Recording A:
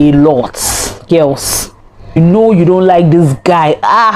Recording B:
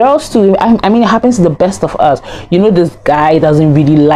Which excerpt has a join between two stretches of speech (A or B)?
A